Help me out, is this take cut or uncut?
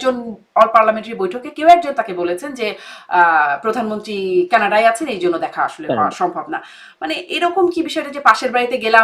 uncut